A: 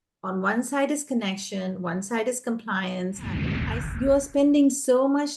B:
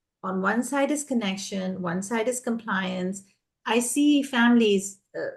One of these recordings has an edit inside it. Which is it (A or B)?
A